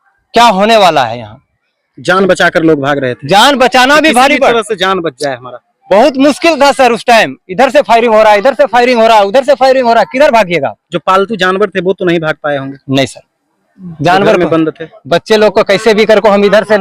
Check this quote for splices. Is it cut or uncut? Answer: uncut